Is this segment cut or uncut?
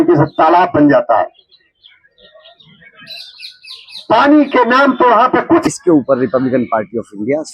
cut